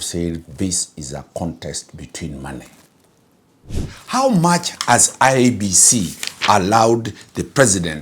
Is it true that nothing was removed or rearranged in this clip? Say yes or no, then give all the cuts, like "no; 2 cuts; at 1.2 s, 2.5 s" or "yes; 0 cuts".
no; 1 cut; at 3.8 s